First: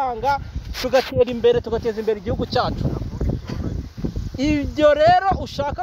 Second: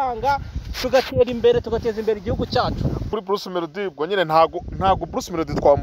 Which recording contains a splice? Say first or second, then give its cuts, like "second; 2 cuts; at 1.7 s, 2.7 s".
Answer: second; 1 cut; at 3.1 s